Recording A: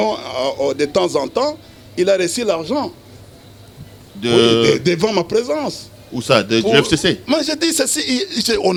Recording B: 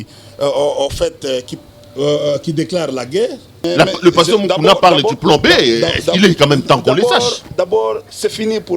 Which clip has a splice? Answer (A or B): B